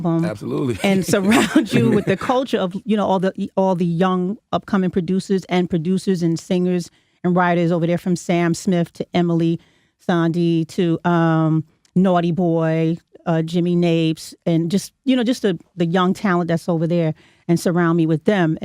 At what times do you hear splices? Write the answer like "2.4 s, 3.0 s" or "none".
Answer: none

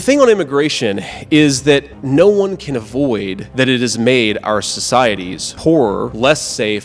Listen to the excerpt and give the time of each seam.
none

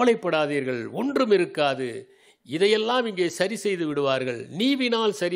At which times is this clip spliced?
none

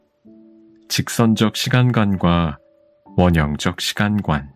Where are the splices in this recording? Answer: 0.9 s

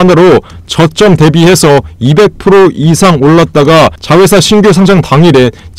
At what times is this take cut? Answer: none

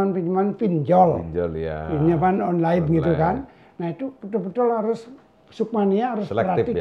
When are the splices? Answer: none

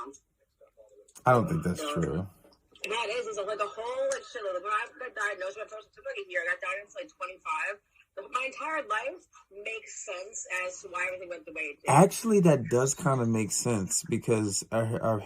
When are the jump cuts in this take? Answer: 5.5 s

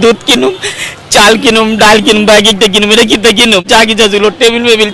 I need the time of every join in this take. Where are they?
3.7 s

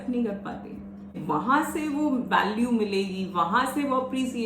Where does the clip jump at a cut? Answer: 1.2 s

